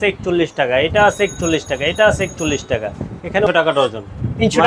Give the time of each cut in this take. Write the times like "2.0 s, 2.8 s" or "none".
3.5 s